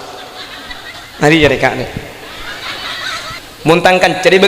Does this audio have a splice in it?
yes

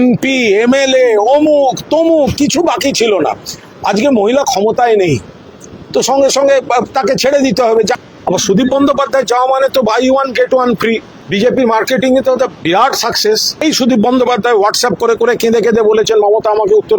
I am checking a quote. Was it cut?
yes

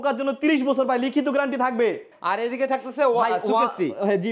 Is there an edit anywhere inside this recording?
yes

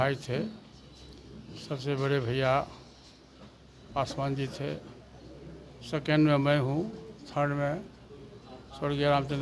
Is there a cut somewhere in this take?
no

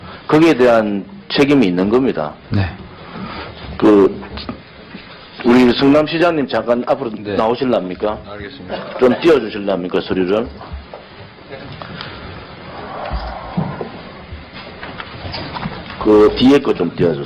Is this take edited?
yes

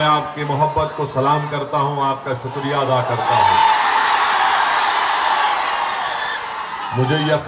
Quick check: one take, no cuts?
yes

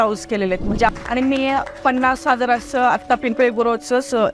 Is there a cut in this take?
yes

